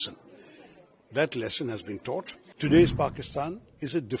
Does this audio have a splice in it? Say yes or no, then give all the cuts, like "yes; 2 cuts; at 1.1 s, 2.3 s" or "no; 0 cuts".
yes; 1 cut; at 2.4 s